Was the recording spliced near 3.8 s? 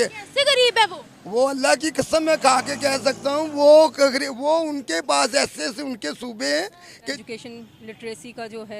no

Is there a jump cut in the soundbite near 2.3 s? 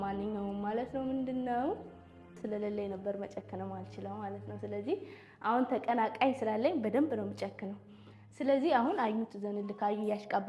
yes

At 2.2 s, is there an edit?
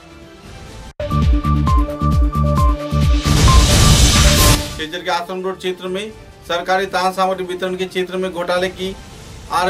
no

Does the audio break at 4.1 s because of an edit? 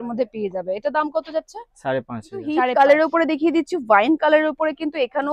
no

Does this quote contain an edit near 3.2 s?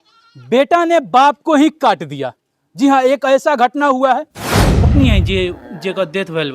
no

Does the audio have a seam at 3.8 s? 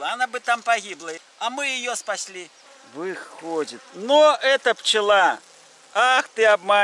no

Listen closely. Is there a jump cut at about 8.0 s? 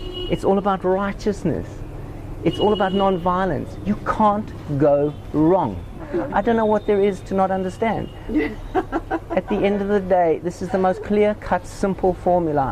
no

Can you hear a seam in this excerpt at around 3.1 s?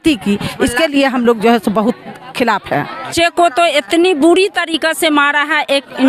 yes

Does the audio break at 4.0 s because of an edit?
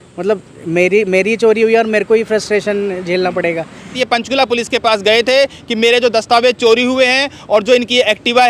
yes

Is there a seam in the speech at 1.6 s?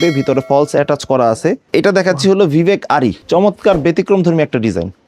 yes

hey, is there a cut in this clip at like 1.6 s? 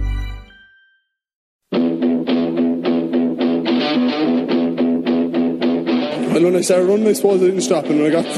yes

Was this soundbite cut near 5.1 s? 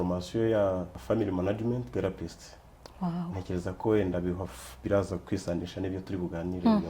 no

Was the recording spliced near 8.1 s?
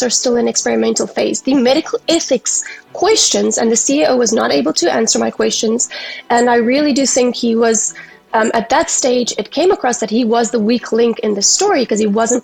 no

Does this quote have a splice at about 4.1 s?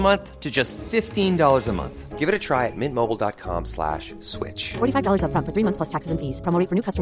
no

